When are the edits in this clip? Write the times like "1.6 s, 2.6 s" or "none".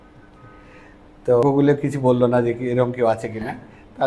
1.4 s